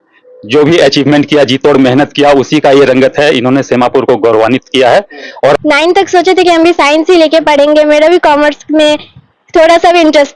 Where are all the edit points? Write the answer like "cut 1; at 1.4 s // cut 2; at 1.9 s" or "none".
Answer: cut 1; at 5.4 s